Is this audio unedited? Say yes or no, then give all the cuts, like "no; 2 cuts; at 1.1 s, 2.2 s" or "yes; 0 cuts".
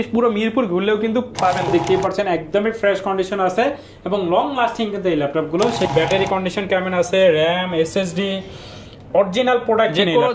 no; 2 cuts; at 1.7 s, 5.9 s